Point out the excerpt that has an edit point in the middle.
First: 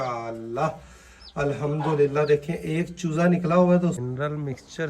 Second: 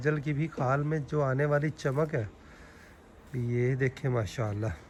first; 1 cut; at 4.0 s

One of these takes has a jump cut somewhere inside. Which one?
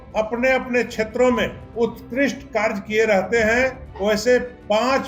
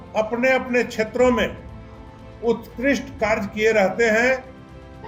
first; 2 cuts; at 1.6 s, 3.9 s

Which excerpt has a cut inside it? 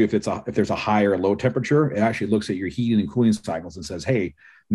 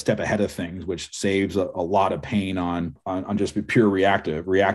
second; 1 cut; at 3.0 s

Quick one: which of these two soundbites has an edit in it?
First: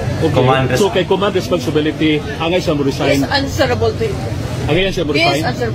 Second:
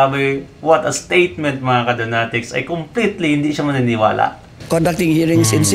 second; 1 cut; at 4.6 s

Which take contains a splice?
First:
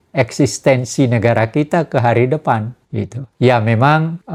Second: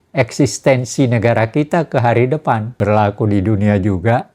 second; 1 cut; at 2.7 s

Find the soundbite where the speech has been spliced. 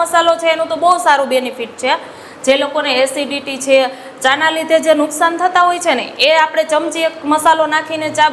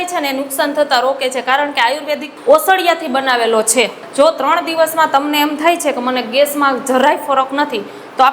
second; 2 cuts; at 2.3 s, 4.0 s

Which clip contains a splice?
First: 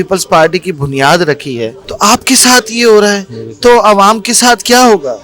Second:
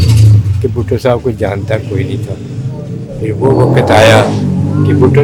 first; 1 cut; at 1.8 s

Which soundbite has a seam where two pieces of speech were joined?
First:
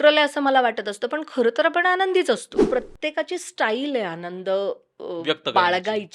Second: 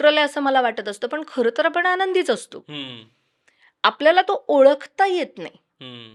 first; 1 cut; at 2.6 s

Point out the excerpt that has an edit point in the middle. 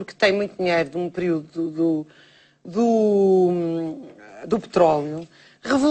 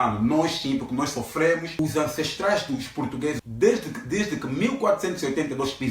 second; 2 cuts; at 1.8 s, 3.4 s

